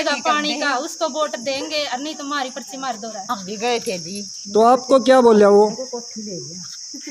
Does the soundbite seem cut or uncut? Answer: cut